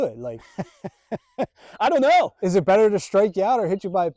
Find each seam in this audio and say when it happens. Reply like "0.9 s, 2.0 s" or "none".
none